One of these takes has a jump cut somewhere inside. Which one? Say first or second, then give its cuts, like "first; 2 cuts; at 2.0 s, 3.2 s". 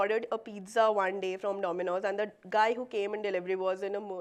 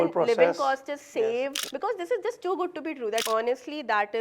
second; 2 cuts; at 1.6 s, 3.2 s